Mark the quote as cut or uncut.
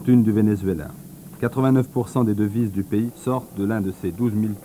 cut